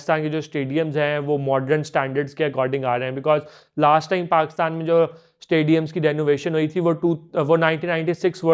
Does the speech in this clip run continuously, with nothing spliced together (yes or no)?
yes